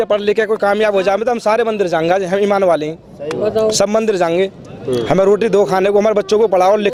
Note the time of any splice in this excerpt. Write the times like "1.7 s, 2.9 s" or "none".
none

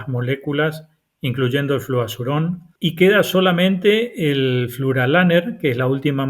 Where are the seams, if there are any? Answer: 2.7 s

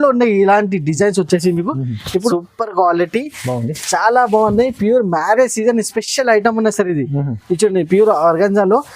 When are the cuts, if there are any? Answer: 2.3 s

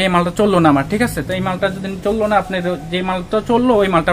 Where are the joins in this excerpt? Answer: none

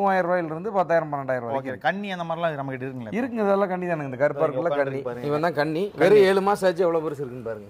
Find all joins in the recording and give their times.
5.1 s

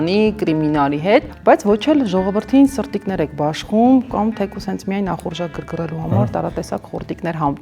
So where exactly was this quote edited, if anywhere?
none

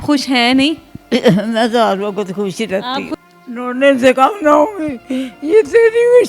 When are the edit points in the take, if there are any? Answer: 0.9 s, 3.1 s

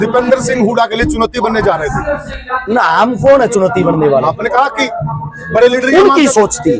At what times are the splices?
none

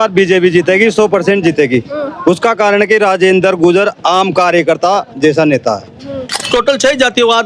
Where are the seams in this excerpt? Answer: 6.5 s

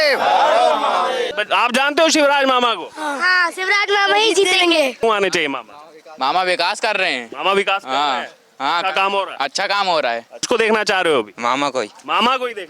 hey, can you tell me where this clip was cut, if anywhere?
1.3 s, 5.0 s, 10.4 s

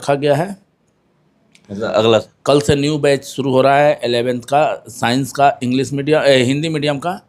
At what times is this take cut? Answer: 2.3 s

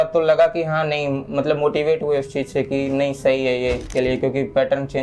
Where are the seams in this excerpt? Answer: 3.9 s

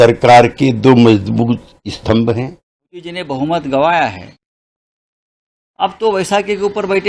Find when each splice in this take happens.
3.1 s

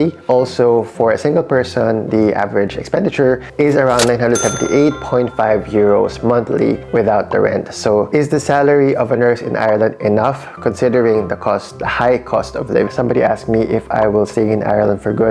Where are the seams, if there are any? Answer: 8.1 s, 12.9 s

